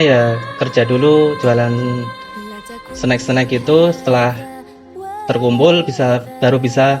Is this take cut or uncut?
uncut